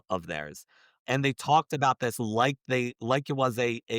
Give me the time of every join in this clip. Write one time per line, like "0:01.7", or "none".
0:01.0